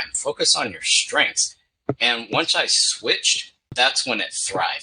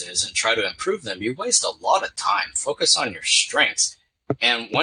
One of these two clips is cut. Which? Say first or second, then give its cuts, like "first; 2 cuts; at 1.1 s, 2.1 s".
first; 1 cut; at 3.8 s